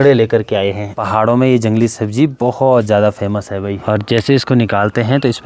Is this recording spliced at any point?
yes; 2 cuts; at 1.0 s, 3.7 s

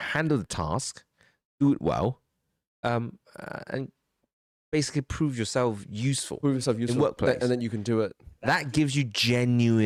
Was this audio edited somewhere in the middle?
no; 0 cuts

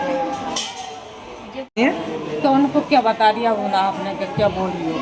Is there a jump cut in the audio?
yes; 1 cut; at 1.8 s

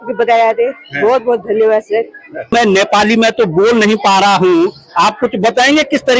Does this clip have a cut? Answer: yes; 1 cut; at 2.5 s

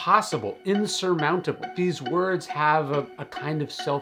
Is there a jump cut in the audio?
no; 0 cuts

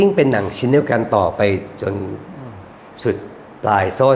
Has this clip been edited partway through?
no; 0 cuts

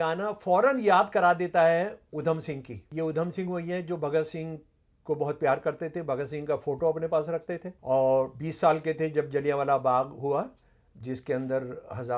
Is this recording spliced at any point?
yes; 2 cuts; at 2.8 s, 7.7 s

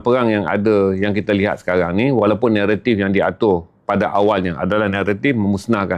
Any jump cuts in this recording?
no; 0 cuts

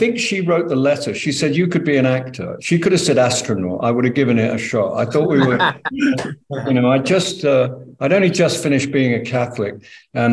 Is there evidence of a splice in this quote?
no; 0 cuts

